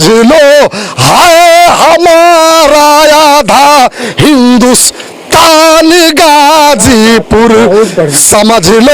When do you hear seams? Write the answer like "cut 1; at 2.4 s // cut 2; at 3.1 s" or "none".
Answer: none